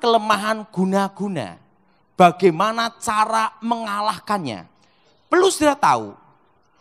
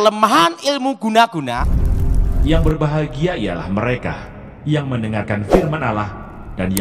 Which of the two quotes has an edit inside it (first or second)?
second